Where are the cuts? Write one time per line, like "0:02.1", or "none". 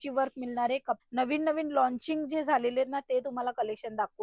0:01.0